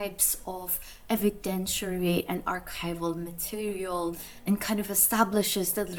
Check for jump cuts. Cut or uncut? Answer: uncut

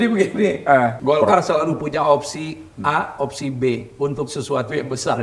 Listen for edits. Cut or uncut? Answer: cut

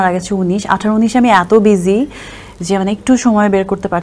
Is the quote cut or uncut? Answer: uncut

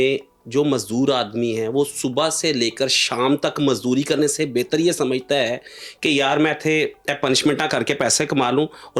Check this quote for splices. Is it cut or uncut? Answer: uncut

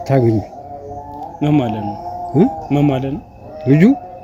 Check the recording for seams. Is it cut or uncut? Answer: uncut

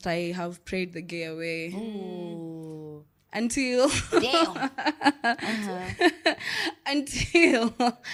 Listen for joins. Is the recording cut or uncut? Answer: uncut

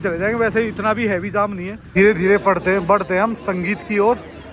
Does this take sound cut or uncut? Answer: cut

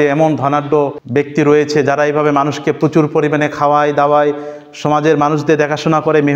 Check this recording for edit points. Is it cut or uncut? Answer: cut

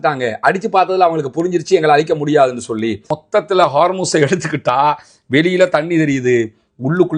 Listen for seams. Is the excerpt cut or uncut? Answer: cut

